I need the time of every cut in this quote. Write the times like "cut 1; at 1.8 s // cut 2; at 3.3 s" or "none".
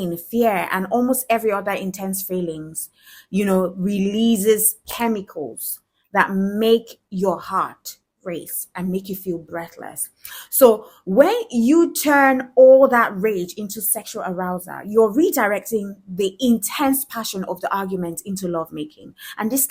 none